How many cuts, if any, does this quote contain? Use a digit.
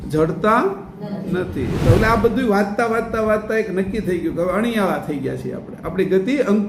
1